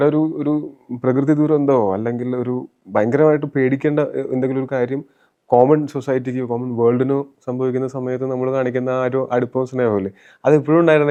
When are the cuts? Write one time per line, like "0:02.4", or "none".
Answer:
none